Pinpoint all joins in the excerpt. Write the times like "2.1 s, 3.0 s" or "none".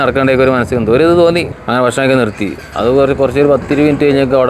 1.6 s

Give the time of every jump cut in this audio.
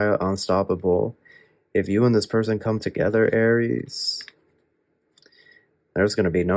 none

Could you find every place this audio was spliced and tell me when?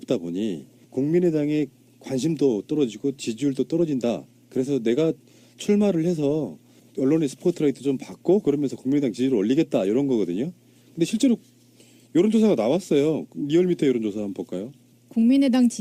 none

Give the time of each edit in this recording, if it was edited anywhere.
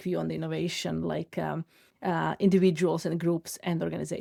none

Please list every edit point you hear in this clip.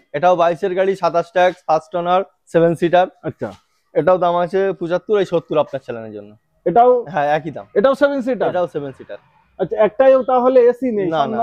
none

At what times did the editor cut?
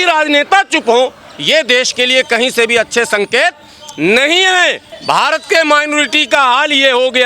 4.9 s

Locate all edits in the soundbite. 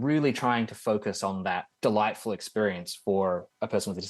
1.7 s

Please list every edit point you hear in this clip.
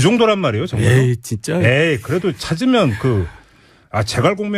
none

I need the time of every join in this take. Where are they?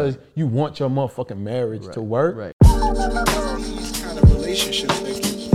2.5 s

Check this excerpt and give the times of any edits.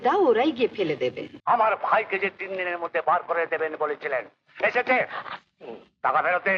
1.3 s

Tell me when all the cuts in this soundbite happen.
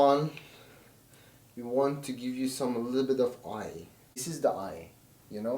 4.2 s

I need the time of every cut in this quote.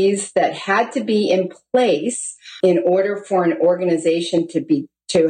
2.6 s

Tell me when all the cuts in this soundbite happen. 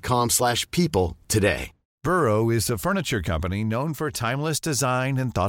none

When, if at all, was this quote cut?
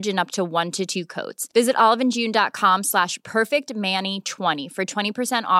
none

